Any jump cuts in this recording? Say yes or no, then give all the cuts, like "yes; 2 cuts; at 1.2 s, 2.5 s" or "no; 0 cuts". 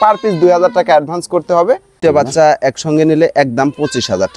yes; 1 cut; at 2.0 s